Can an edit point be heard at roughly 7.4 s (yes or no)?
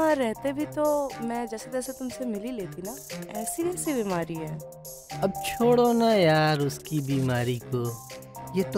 no